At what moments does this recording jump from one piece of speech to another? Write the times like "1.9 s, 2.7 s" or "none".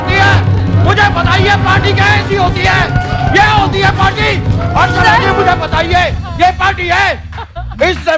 none